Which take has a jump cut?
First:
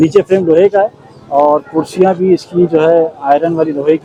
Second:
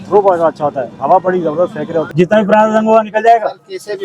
second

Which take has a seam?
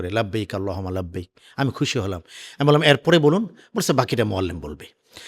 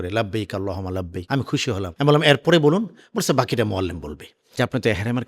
second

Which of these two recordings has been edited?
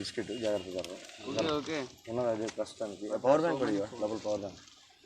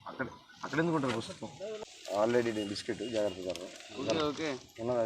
second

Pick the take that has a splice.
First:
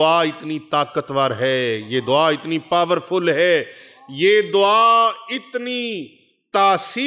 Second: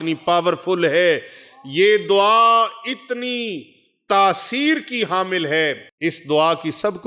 second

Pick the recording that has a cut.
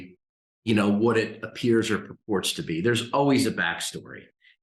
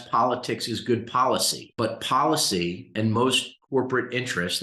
second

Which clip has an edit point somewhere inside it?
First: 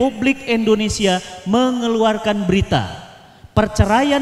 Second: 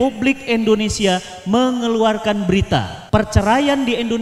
second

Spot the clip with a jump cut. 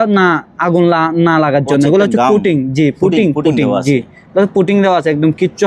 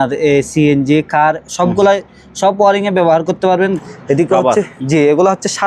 second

